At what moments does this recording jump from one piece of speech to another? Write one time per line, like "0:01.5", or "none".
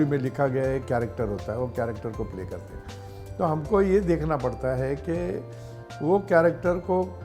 none